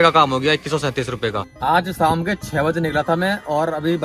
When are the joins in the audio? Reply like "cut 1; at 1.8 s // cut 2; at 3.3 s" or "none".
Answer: cut 1; at 1.5 s